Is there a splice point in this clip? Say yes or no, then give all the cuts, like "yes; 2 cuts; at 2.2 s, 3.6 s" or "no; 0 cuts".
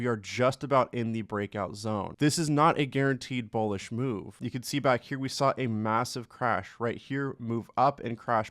yes; 1 cut; at 2.0 s